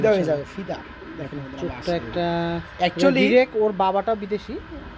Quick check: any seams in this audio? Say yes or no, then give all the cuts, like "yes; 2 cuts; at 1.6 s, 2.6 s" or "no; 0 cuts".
no; 0 cuts